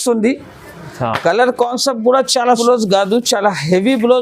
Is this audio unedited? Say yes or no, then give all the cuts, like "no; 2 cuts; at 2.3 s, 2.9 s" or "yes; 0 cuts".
no; 1 cut; at 2.6 s